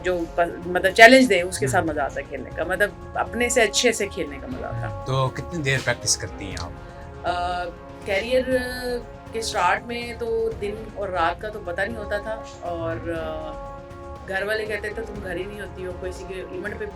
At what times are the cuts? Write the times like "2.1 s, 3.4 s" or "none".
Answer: 4.9 s